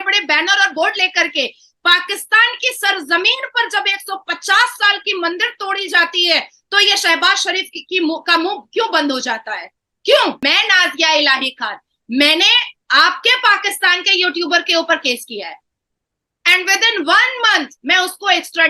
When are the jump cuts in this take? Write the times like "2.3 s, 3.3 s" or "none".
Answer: 10.4 s